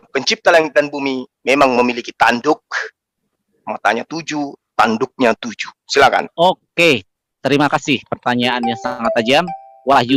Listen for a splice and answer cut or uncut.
uncut